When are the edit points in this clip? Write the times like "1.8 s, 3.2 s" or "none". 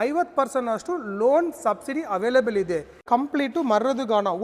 3.0 s